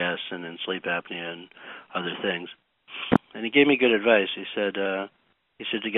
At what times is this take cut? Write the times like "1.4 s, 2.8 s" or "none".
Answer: 3.2 s

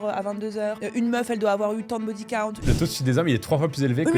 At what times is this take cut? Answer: 0.8 s, 2.6 s

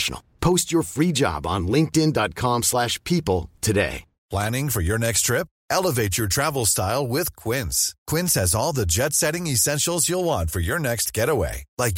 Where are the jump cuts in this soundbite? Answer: 4.3 s

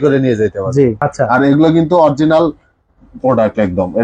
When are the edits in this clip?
1.0 s

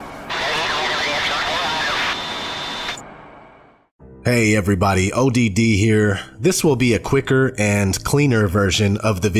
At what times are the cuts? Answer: 7.9 s

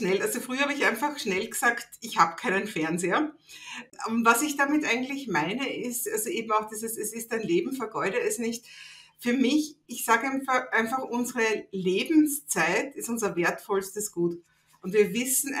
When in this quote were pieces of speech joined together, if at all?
3.8 s

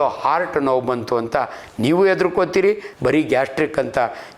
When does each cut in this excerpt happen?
2.9 s

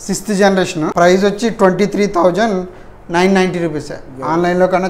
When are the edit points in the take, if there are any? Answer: 0.9 s

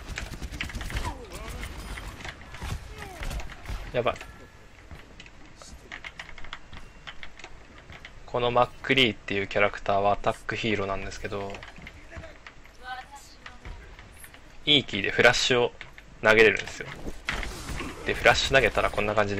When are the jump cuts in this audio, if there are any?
14.4 s

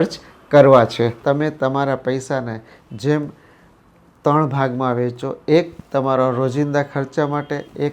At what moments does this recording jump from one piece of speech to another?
1.2 s

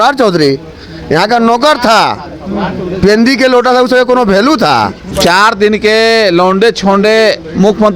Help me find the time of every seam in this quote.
5.1 s

